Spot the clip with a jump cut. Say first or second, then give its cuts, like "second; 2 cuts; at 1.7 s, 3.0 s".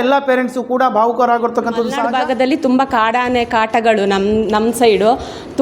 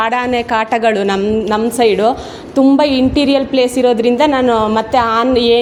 first; 1 cut; at 2.0 s